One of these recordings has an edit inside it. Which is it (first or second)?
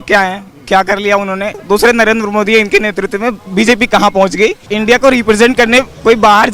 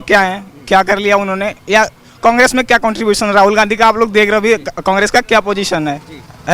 first